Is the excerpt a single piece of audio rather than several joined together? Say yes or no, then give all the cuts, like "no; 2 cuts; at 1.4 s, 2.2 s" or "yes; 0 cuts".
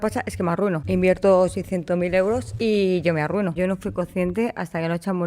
no; 3 cuts; at 0.8 s, 2.5 s, 3.5 s